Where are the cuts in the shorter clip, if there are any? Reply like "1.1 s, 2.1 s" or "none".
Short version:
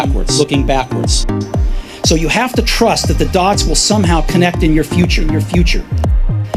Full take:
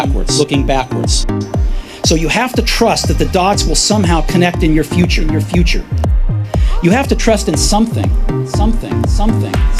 none